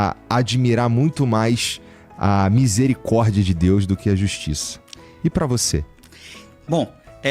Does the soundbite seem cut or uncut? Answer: uncut